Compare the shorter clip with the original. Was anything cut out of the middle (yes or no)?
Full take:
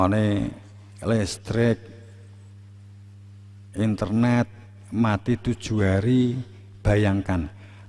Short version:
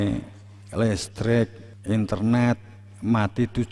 yes